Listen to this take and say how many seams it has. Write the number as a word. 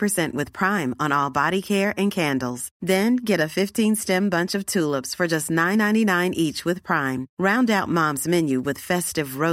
zero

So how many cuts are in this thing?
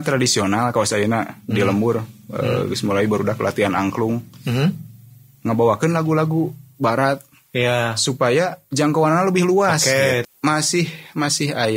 one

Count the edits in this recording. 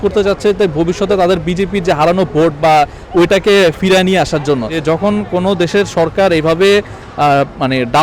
one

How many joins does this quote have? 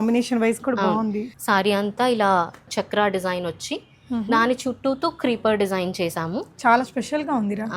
two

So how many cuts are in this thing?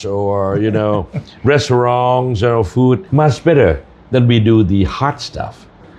one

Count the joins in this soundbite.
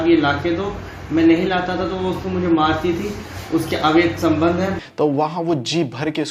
one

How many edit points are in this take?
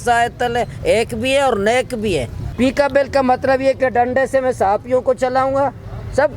one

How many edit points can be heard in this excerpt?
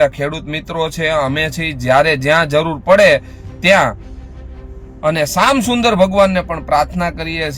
zero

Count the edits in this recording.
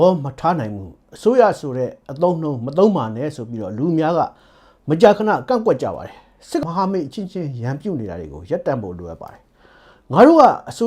one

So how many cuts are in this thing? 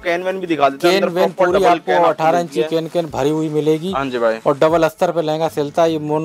zero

